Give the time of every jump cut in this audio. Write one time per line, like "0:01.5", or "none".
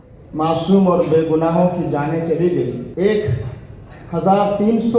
0:02.9